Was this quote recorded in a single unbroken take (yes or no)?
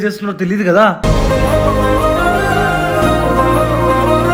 yes